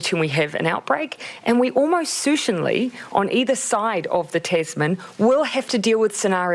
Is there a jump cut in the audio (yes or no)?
no